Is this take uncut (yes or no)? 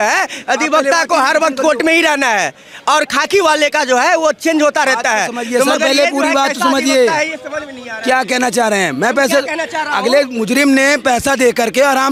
yes